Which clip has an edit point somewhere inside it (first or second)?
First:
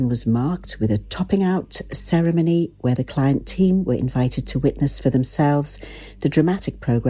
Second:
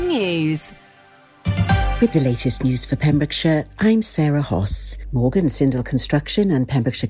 second